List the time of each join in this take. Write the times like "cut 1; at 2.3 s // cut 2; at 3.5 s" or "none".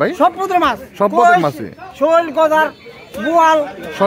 none